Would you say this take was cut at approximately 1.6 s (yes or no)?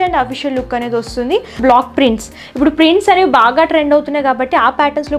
yes